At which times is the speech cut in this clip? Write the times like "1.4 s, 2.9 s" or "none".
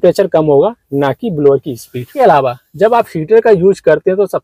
2.1 s